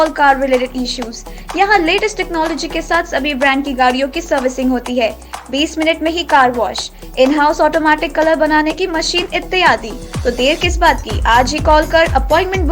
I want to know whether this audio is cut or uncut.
uncut